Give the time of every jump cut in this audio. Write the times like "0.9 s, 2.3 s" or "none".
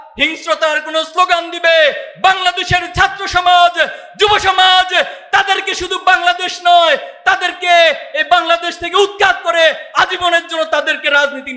none